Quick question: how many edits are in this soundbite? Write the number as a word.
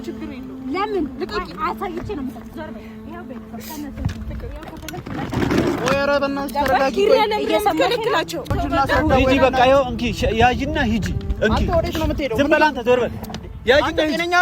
one